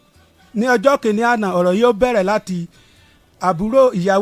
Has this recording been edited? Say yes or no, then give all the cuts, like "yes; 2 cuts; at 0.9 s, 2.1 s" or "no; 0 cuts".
no; 0 cuts